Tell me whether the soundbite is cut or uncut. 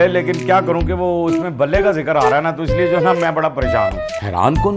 cut